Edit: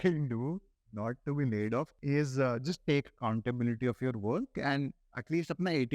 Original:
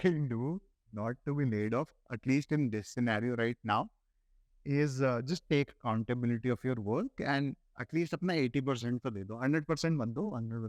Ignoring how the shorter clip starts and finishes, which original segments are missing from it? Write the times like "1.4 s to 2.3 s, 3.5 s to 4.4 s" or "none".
1.9 s to 4.6 s